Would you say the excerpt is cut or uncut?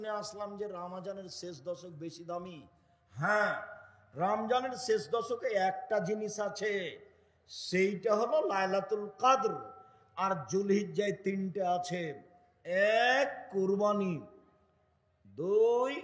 uncut